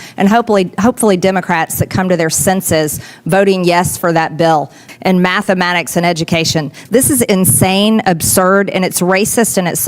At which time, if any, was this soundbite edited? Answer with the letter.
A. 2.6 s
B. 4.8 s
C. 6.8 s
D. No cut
B